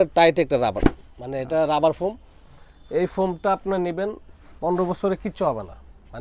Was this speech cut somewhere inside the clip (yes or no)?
no